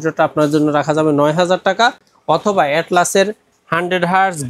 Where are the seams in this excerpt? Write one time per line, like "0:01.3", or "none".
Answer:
none